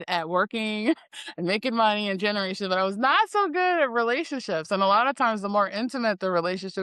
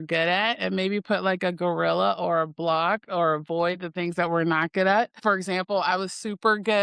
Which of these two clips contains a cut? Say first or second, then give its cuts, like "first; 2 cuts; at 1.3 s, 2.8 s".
second; 1 cut; at 5.2 s